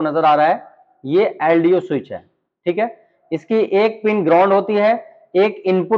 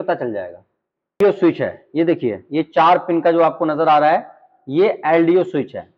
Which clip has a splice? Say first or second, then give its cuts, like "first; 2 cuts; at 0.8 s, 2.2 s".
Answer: second; 1 cut; at 1.2 s